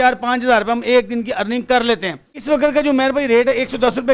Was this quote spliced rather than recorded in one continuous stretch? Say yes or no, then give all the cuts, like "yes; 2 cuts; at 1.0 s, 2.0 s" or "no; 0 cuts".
yes; 1 cut; at 2.3 s